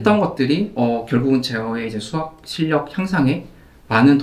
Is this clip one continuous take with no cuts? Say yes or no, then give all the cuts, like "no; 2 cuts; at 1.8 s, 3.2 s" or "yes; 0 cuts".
yes; 0 cuts